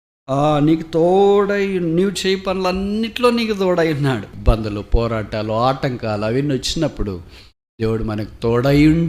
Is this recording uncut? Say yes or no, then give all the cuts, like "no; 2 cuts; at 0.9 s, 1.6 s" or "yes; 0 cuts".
no; 1 cut; at 4.3 s